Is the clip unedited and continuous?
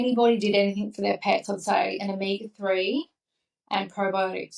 yes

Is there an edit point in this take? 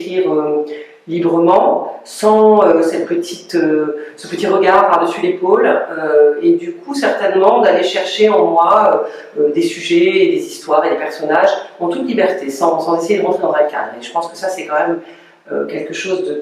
no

